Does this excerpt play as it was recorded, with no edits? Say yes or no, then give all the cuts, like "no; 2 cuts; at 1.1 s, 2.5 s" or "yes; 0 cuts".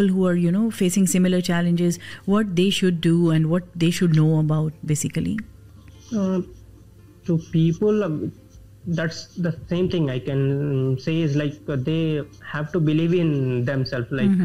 yes; 0 cuts